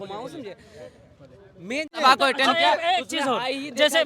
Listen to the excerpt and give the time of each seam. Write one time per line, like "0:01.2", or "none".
0:02.0